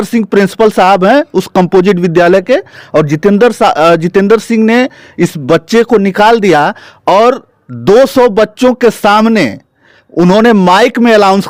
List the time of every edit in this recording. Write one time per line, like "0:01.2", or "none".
none